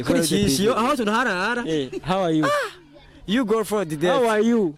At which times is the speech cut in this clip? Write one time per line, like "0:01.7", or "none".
none